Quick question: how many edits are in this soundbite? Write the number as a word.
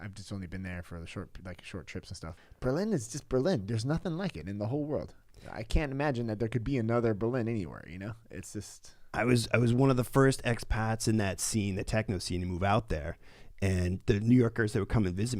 one